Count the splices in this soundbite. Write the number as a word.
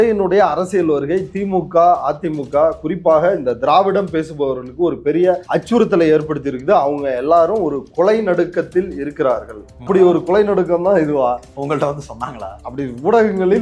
three